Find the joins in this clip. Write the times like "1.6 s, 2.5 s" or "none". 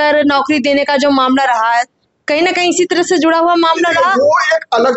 none